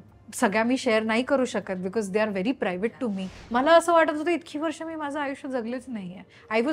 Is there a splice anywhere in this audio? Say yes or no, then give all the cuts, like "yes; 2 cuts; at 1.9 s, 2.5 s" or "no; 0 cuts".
yes; 1 cut; at 3.3 s